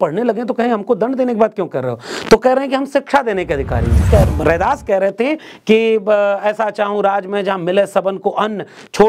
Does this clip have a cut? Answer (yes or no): yes